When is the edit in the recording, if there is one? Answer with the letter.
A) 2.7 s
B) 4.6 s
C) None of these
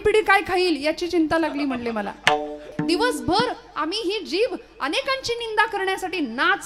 A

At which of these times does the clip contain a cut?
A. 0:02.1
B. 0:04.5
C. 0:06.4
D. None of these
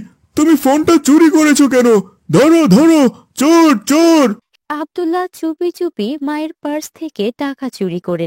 B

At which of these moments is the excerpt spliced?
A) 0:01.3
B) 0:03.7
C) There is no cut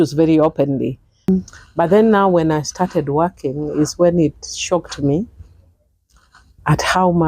A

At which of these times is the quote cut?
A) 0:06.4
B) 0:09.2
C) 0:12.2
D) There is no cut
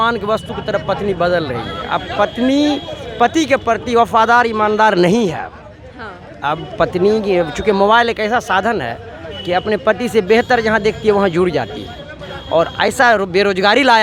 D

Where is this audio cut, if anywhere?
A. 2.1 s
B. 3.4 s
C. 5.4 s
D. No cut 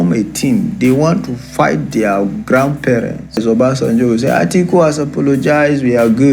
B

